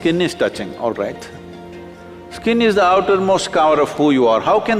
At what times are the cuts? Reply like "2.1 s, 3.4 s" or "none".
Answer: none